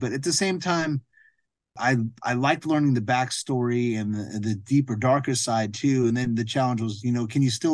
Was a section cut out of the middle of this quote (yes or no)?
yes